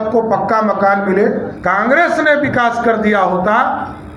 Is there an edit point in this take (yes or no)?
yes